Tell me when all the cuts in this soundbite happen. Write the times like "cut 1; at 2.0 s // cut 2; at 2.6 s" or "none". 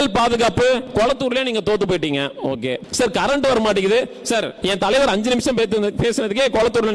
cut 1; at 0.9 s // cut 2; at 2.8 s // cut 3; at 4.5 s